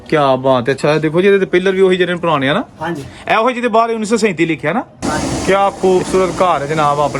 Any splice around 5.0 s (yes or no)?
yes